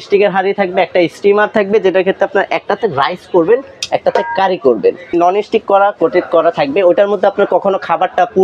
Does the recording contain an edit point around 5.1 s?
yes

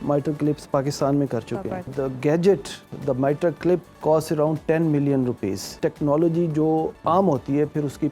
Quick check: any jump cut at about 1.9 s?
yes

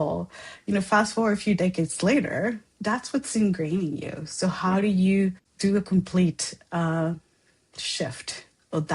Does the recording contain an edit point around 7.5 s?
no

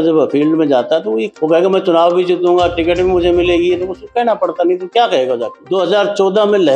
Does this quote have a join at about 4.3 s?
no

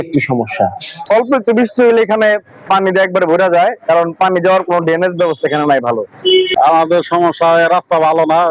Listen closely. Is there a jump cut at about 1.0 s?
yes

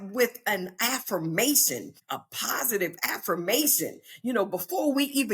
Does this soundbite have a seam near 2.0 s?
yes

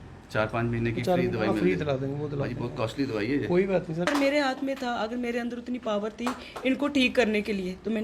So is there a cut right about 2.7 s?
no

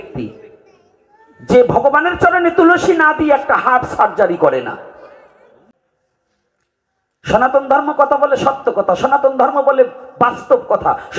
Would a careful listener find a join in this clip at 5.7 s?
yes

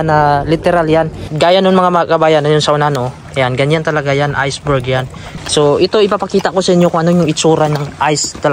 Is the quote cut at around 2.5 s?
no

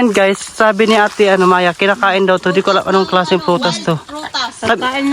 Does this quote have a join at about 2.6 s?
no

